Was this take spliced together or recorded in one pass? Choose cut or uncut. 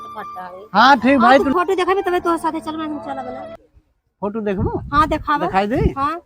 cut